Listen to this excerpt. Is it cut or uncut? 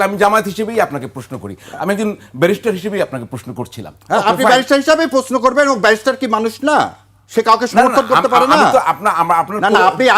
uncut